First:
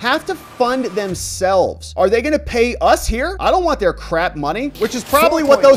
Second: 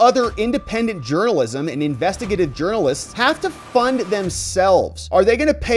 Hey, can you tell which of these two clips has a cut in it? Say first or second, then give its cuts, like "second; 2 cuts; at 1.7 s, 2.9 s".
first; 1 cut; at 4.7 s